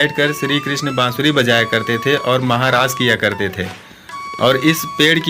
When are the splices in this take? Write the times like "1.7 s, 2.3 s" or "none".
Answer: none